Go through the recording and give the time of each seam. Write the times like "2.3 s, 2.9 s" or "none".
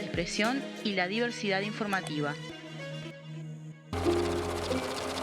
3.9 s